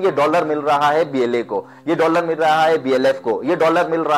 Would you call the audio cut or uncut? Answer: uncut